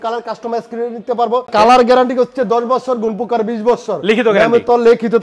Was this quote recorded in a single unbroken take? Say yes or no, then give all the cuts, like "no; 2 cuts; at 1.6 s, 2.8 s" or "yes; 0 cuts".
no; 1 cut; at 1.5 s